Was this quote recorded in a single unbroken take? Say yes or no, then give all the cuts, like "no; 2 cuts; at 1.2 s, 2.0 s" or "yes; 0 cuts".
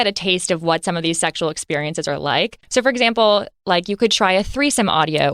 no; 1 cut; at 2.6 s